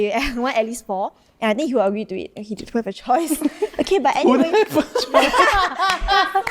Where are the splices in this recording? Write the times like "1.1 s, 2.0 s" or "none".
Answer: none

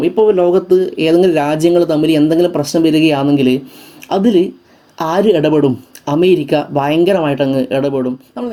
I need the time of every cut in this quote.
none

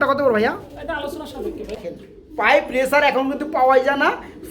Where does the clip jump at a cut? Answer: 1.7 s

